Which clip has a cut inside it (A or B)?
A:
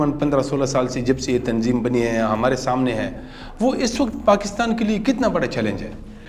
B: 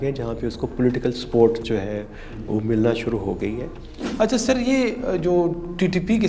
B